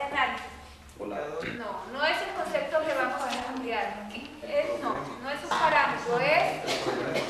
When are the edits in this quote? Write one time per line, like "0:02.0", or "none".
none